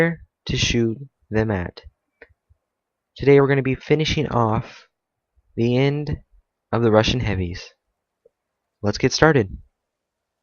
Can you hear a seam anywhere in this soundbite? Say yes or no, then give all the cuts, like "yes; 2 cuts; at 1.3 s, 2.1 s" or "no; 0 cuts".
yes; 1 cut; at 6.8 s